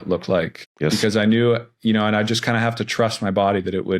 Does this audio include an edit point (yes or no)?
yes